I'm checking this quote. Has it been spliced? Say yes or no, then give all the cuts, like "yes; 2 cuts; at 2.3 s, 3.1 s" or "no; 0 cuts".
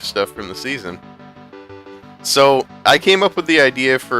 yes; 1 cut; at 2.5 s